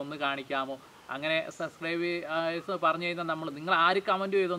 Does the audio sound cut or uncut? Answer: uncut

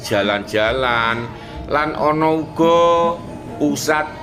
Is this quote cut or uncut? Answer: uncut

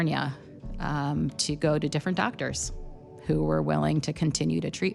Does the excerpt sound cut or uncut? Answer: uncut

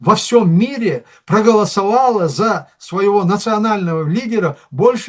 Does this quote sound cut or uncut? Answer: uncut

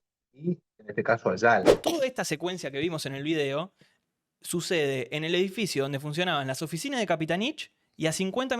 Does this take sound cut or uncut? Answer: cut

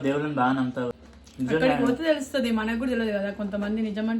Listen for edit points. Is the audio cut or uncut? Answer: cut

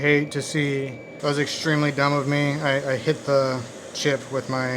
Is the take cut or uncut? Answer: cut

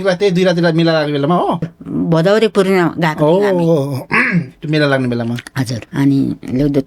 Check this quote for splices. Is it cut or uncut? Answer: cut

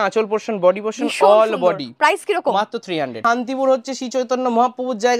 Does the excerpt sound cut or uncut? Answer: cut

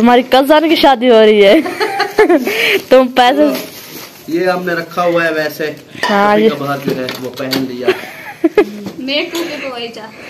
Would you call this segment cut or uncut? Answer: uncut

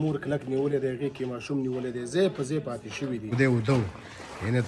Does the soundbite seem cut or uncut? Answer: cut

